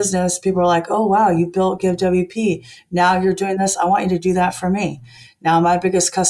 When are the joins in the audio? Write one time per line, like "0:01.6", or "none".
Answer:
none